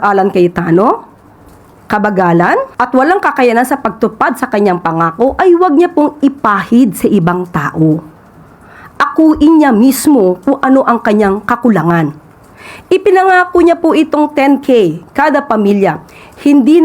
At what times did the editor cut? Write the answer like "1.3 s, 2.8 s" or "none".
2.7 s